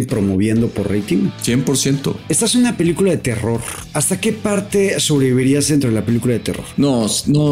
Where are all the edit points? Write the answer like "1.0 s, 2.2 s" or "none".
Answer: 1.4 s, 2.2 s, 4.0 s, 6.6 s